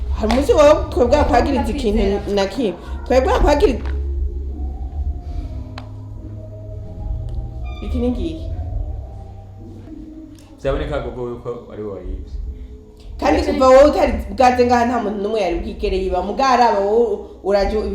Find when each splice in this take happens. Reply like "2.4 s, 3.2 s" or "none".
9.9 s